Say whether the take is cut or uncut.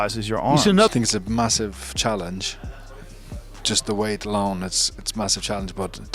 cut